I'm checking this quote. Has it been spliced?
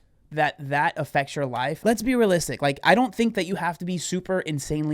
yes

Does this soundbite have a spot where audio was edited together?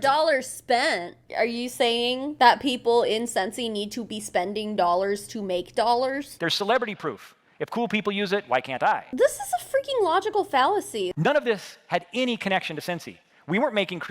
yes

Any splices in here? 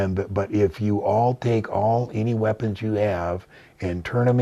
no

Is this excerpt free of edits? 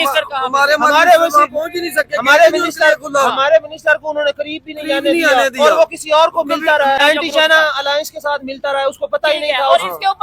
no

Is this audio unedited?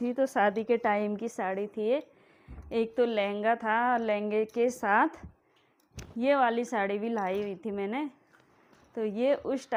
yes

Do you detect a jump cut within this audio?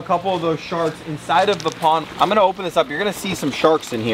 yes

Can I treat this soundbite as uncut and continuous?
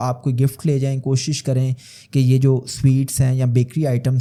yes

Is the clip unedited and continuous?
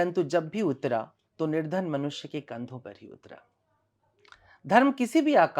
yes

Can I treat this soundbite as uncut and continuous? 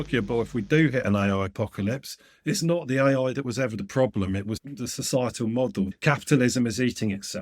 no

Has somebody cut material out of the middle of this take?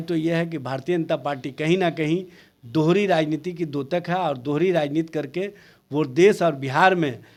no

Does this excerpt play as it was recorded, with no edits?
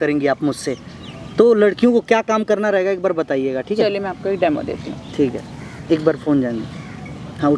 yes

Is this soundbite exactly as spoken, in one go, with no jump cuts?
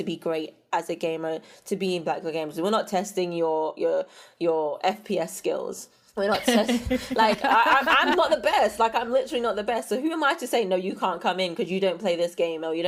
yes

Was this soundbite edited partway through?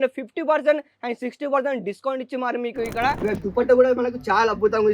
yes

